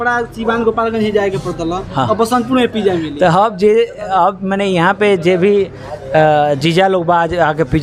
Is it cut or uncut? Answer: uncut